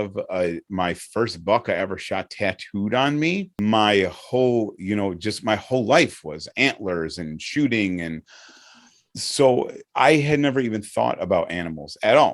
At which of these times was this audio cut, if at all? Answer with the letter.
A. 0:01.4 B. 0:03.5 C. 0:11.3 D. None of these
B